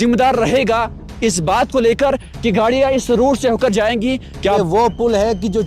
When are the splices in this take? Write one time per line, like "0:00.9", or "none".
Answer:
0:04.6